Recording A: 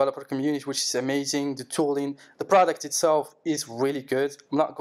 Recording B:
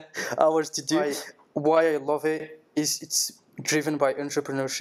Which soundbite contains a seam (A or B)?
B